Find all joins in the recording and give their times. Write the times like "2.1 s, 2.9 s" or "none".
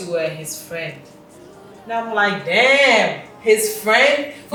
none